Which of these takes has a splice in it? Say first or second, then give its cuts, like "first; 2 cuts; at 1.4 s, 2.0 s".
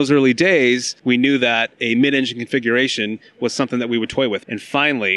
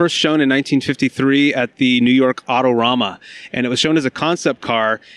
first; 2 cuts; at 0.9 s, 4.4 s